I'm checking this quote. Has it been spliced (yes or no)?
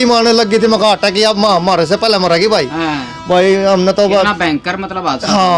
no